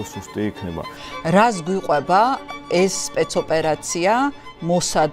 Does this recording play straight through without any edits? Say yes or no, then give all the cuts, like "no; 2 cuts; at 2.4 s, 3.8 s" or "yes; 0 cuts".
no; 1 cut; at 1.0 s